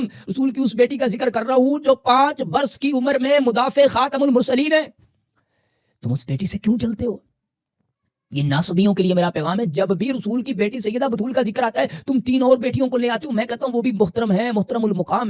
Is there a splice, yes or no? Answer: no